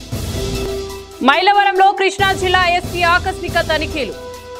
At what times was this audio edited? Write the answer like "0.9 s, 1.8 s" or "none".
1.1 s